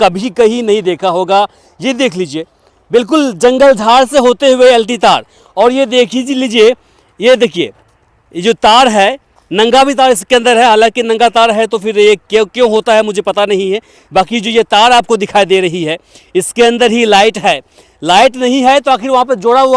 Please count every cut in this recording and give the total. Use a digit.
0